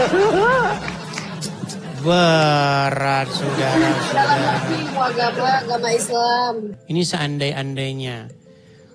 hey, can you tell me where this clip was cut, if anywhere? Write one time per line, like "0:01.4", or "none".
0:06.7